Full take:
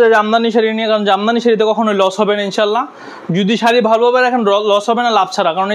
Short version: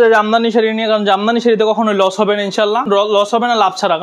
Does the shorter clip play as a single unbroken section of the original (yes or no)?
no